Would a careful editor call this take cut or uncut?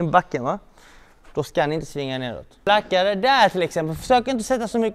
cut